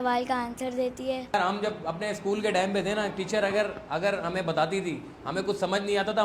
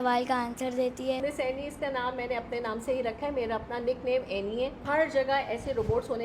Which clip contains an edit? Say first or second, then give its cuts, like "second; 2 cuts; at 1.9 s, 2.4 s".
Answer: second; 2 cuts; at 1.2 s, 4.8 s